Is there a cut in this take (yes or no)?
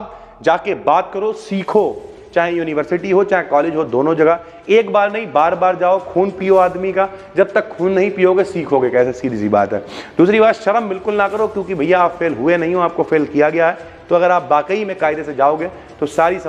no